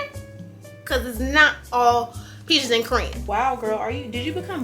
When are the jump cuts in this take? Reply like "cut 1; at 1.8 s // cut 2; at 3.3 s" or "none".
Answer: cut 1; at 3.2 s